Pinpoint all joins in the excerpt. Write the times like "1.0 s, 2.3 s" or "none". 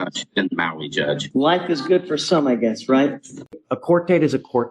1.2 s, 3.5 s